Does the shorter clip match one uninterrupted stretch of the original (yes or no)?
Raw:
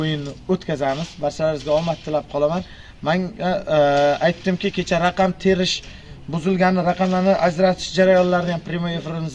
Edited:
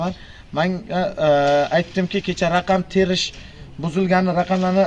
yes